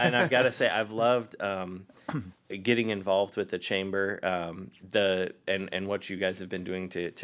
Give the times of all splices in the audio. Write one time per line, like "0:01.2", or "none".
none